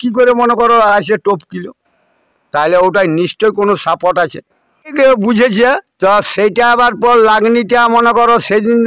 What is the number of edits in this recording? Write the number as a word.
one